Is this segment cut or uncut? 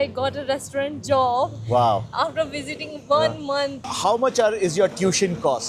cut